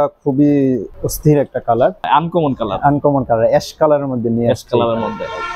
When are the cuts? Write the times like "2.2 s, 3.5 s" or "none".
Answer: 2.0 s